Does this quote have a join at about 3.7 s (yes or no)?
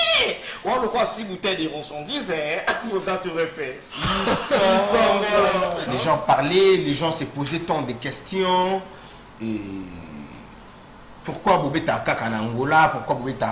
no